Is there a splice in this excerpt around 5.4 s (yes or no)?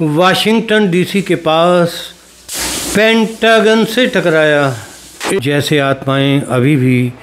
yes